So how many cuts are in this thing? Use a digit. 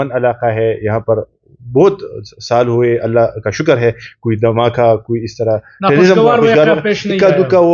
0